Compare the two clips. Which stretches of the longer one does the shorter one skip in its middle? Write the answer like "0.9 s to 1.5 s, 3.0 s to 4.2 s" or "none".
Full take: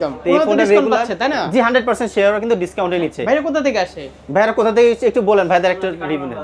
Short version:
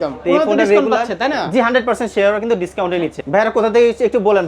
3.2 s to 4.2 s